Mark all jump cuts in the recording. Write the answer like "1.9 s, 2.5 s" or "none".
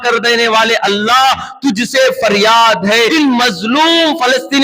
3.1 s